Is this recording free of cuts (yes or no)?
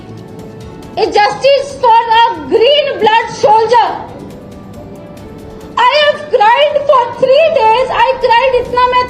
yes